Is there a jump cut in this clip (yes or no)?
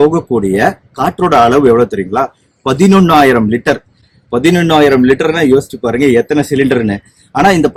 no